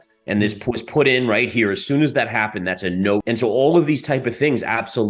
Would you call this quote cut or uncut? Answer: cut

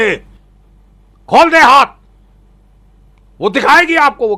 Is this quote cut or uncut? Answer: uncut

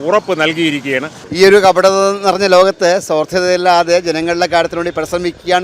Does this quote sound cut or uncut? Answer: cut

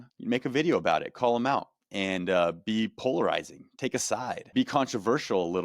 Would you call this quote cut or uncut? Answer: cut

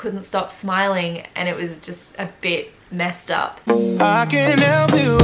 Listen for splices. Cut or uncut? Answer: cut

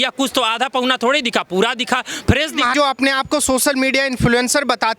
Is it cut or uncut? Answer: uncut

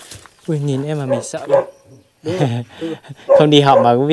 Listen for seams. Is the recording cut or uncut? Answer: cut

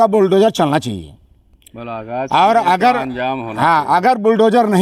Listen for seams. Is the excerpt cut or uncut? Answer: uncut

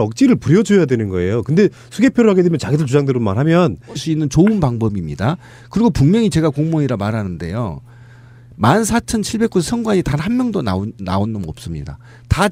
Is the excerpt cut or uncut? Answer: uncut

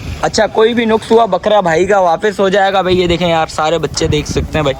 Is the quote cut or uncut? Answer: uncut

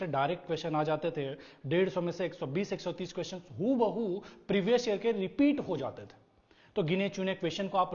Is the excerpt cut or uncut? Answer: uncut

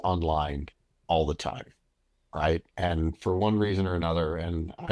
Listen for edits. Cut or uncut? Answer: uncut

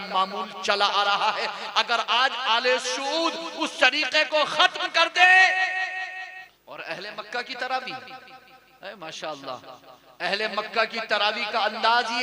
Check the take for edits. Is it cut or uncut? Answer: cut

